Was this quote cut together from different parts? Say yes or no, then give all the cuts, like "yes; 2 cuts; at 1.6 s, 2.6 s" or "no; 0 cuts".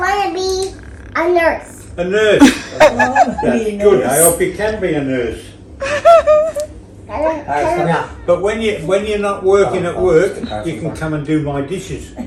no; 0 cuts